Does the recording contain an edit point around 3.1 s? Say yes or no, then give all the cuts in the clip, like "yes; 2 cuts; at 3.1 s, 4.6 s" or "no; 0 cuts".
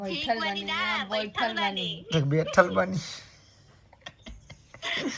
no; 0 cuts